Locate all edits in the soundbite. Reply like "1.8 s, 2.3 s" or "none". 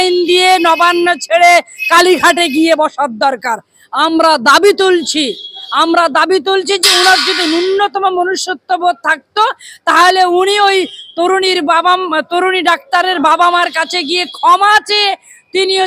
none